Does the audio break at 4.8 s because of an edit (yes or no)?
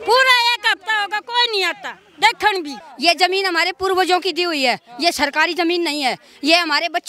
no